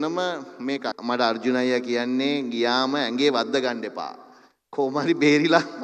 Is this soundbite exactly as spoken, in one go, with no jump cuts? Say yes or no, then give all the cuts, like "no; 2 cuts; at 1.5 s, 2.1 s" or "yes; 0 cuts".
no; 1 cut; at 0.9 s